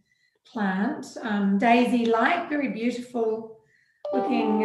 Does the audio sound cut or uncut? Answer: uncut